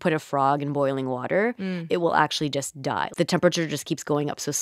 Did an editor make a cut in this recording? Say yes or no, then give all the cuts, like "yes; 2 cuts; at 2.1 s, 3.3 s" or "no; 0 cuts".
yes; 1 cut; at 3.1 s